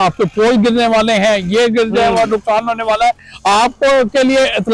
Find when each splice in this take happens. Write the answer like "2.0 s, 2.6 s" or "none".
none